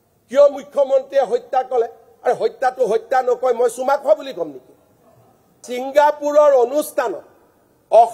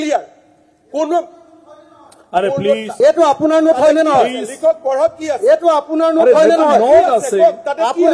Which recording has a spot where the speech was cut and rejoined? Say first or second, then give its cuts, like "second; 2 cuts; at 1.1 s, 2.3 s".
first; 1 cut; at 5.6 s